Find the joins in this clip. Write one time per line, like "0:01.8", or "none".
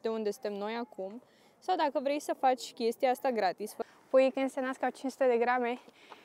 0:03.7